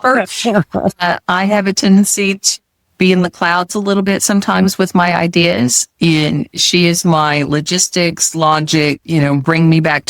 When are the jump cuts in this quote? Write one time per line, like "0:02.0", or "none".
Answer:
0:09.0

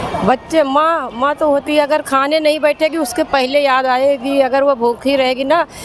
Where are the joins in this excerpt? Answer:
none

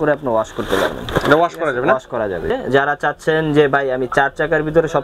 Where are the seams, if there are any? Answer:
0:02.5

